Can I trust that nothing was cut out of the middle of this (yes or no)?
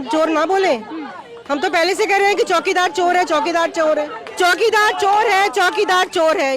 no